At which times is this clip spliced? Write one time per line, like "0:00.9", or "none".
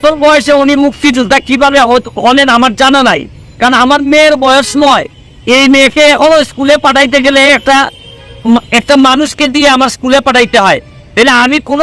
none